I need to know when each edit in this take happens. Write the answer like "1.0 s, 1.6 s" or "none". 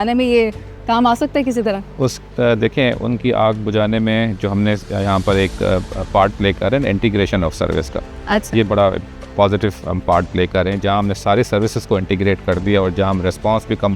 none